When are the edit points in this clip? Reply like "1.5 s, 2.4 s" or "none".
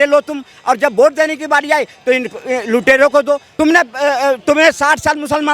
3.5 s